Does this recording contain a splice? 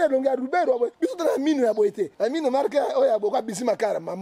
yes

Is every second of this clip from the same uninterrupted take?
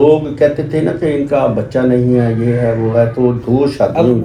yes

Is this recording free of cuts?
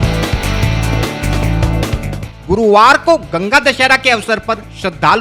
no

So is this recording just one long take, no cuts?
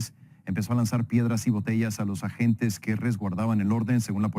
yes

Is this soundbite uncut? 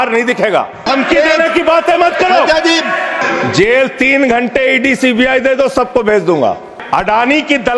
no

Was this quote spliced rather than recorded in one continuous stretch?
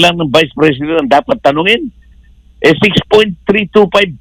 no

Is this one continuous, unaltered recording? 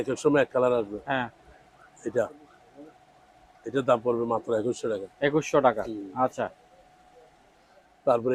yes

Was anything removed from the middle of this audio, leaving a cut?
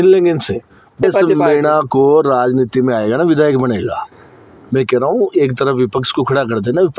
yes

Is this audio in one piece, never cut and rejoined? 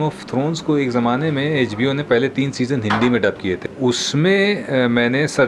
no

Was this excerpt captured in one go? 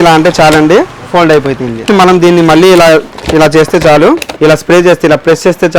no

